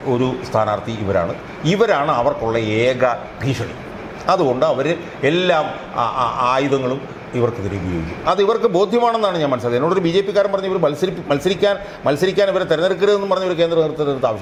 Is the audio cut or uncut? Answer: uncut